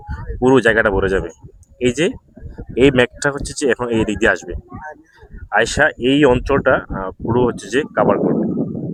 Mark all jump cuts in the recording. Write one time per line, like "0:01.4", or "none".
none